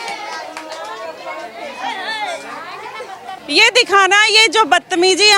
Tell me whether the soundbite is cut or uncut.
cut